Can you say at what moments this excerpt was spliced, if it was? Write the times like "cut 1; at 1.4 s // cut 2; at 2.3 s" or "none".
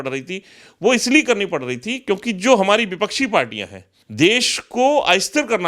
cut 1; at 3.8 s